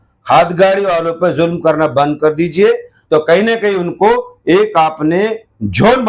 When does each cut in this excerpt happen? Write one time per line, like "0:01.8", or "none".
0:02.9